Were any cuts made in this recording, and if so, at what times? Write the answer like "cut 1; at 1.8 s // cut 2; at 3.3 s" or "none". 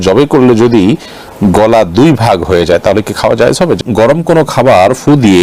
cut 1; at 3.8 s